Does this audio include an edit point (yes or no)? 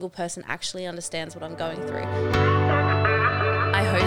yes